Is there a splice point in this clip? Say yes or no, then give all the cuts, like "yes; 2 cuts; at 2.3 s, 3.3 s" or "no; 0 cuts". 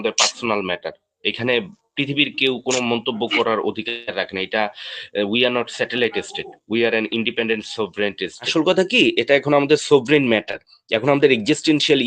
yes; 1 cut; at 8.4 s